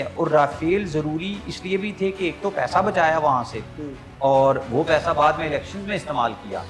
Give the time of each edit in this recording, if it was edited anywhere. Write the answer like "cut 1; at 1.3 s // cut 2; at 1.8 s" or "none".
none